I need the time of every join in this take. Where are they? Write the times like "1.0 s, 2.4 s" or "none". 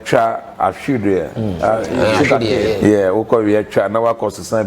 2.8 s